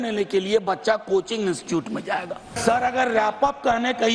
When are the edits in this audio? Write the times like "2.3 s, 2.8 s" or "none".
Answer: 2.6 s